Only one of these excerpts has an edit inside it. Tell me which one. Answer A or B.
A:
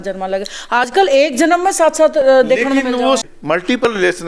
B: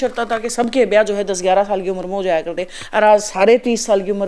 A